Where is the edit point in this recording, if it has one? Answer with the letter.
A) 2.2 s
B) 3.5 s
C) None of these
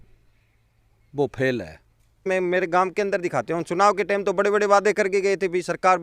A